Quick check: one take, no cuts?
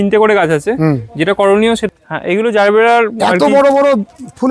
no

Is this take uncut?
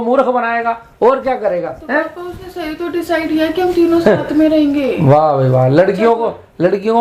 yes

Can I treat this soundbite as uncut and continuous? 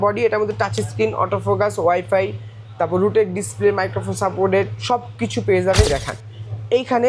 no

